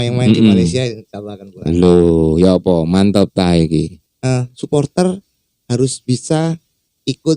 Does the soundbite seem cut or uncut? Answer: cut